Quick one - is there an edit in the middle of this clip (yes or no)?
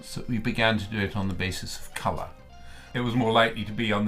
yes